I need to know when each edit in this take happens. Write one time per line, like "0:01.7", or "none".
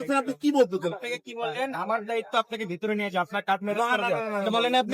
0:00.9